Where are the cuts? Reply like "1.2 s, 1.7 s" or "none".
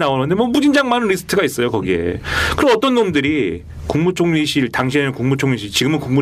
1.6 s